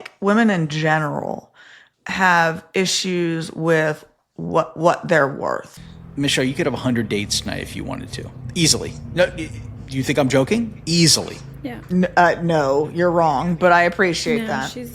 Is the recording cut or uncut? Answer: cut